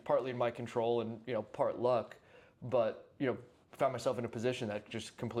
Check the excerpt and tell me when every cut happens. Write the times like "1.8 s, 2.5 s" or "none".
none